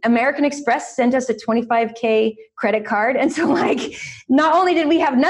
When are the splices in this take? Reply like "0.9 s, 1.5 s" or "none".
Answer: none